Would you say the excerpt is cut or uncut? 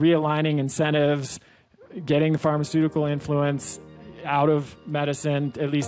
uncut